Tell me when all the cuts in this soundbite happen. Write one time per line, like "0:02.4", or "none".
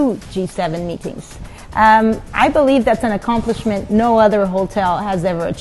none